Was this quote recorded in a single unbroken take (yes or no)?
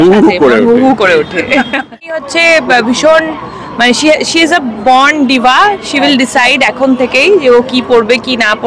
no